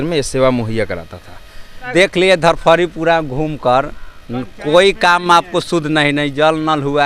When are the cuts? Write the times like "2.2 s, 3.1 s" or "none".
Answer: 1.9 s